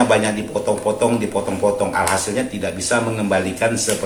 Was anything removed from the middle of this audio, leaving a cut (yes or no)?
no